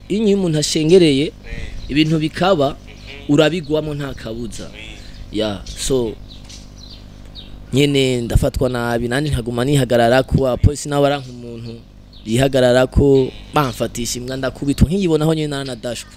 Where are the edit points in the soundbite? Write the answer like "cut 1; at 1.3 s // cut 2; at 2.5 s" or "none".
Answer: none